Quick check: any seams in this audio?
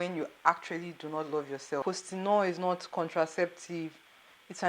yes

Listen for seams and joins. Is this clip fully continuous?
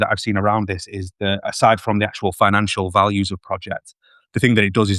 yes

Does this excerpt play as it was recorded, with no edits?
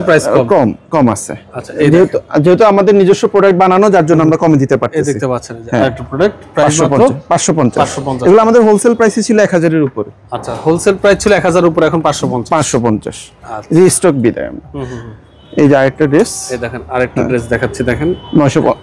yes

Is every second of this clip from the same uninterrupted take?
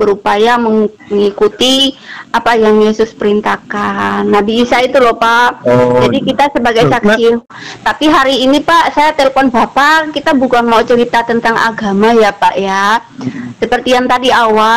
no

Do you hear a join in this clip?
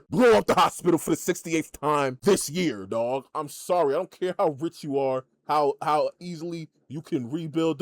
no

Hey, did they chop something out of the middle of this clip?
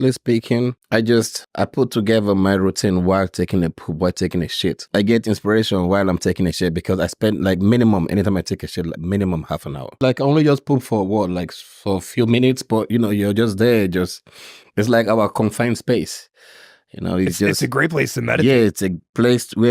yes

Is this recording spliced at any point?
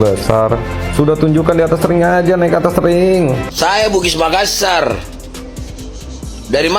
yes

